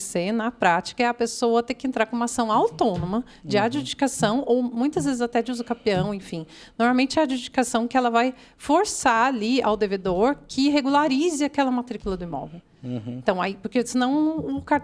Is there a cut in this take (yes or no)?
no